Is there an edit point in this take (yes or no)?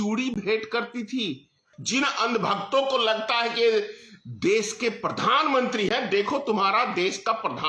yes